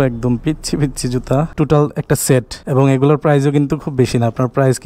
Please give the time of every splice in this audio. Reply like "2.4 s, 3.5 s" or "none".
1.5 s, 2.6 s